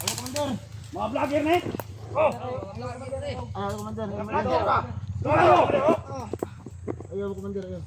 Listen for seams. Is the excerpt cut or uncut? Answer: uncut